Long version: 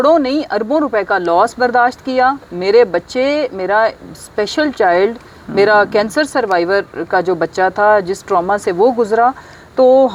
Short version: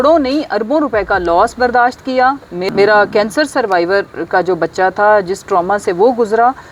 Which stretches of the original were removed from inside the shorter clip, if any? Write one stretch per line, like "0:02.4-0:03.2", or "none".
0:02.5-0:05.3